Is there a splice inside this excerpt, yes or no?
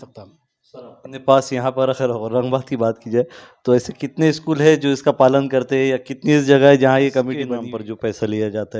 yes